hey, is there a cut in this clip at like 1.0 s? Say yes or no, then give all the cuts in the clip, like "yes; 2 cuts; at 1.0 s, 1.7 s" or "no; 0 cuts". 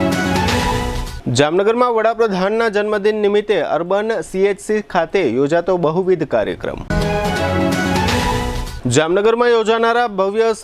no; 0 cuts